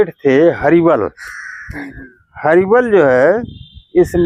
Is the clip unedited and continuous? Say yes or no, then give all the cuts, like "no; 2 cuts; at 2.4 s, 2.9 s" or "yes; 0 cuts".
yes; 0 cuts